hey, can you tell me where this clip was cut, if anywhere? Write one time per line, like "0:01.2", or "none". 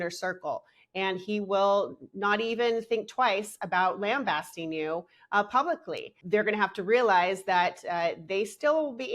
0:06.1